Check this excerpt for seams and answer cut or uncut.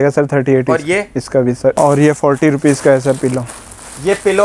cut